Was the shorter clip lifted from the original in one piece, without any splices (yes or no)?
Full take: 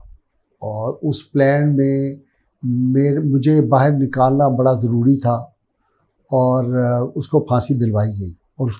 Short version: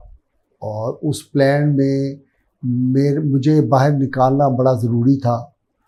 yes